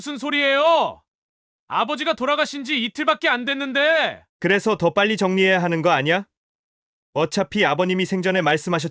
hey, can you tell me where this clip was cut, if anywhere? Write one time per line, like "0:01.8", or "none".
none